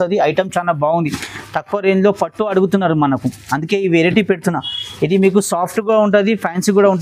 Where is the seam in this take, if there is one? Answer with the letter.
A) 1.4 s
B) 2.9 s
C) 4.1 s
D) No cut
D